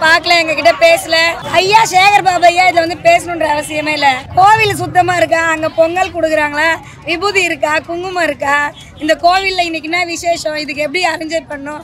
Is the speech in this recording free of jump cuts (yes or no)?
no